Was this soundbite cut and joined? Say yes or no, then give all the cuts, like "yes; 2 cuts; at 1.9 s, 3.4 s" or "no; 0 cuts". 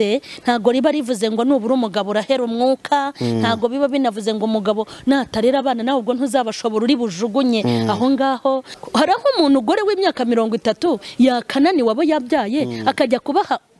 yes; 1 cut; at 8.7 s